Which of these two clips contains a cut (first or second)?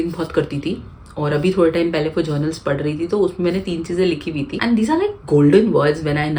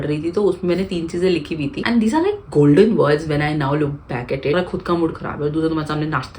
second